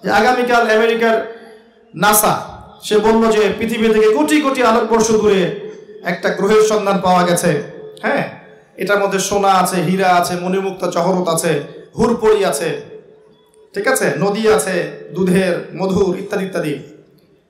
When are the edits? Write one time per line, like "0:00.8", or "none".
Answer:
none